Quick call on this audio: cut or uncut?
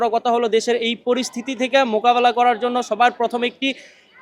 uncut